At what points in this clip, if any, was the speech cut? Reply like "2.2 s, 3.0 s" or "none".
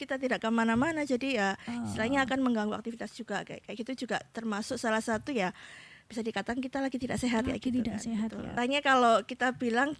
8.4 s